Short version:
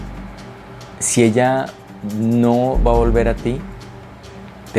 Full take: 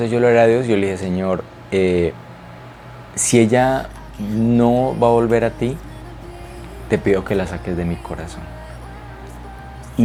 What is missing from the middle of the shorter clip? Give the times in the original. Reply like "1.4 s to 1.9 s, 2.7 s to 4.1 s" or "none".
none